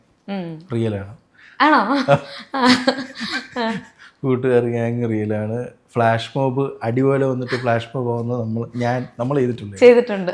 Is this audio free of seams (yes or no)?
yes